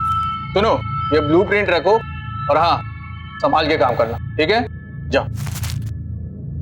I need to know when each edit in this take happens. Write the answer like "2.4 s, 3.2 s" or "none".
5.3 s

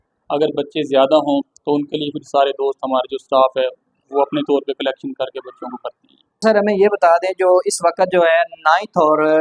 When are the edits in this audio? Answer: 6.4 s

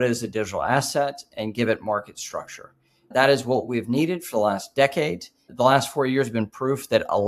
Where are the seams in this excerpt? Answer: 3.1 s, 5.5 s

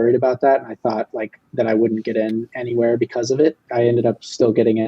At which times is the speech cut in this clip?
3.7 s

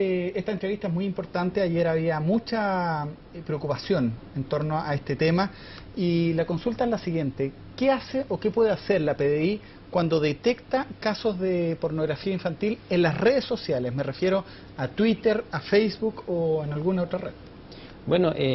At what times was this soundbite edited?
15.6 s

